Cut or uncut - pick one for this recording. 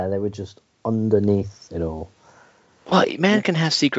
uncut